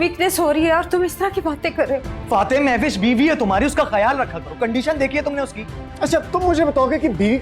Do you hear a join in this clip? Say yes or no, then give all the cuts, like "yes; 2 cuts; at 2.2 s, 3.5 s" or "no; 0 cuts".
yes; 1 cut; at 2.1 s